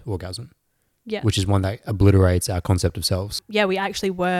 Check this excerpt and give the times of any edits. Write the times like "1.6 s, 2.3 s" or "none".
3.4 s